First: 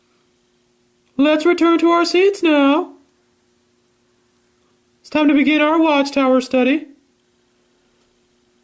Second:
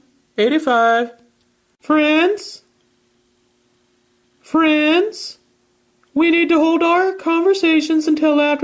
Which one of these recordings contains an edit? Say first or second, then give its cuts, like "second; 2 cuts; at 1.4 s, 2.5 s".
first; 1 cut; at 2.5 s